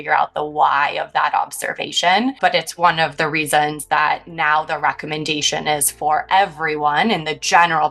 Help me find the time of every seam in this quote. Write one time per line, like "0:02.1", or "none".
0:02.4